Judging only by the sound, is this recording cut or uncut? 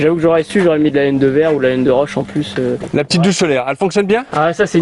cut